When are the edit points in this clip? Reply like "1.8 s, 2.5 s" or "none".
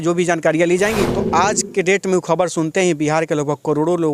1.1 s